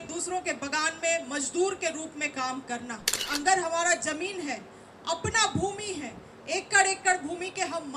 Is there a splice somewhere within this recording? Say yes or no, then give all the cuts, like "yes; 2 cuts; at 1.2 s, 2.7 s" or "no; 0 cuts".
yes; 1 cut; at 3.2 s